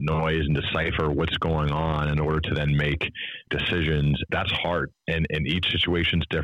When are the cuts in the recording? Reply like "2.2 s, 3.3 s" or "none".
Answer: 3.5 s, 4.3 s